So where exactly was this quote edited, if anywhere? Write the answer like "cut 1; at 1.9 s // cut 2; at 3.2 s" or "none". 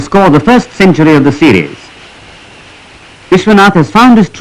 cut 1; at 3.3 s